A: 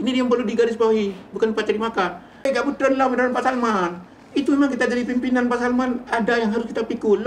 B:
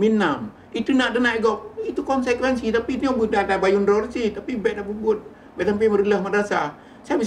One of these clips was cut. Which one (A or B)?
A